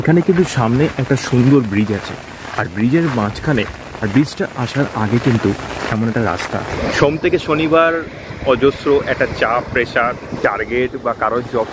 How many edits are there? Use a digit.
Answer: 2